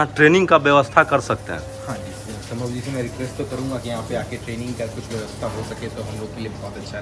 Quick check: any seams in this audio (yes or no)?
no